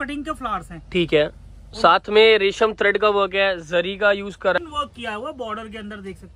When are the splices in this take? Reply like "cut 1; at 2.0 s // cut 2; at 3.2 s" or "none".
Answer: cut 1; at 4.6 s